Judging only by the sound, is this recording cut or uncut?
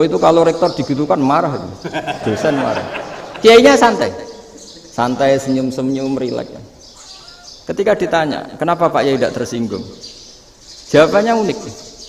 uncut